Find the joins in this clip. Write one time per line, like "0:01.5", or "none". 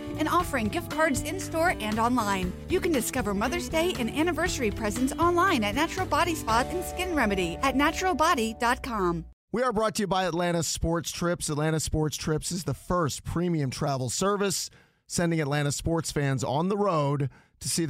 0:09.3